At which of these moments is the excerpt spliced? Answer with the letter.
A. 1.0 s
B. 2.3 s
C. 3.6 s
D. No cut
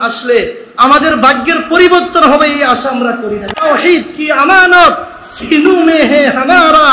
C